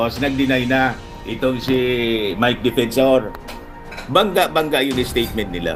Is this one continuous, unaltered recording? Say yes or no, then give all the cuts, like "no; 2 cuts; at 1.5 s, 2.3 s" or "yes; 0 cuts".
yes; 0 cuts